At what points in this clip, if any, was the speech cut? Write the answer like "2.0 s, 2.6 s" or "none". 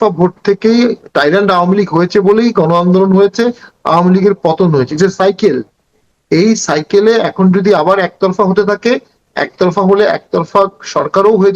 1.0 s